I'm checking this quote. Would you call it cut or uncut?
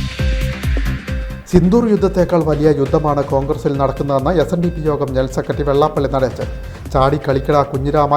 cut